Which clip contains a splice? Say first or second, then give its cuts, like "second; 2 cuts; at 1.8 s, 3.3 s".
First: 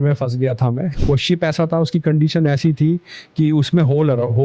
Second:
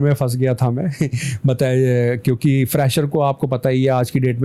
first; 1 cut; at 0.9 s